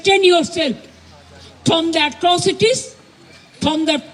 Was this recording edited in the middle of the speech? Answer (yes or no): no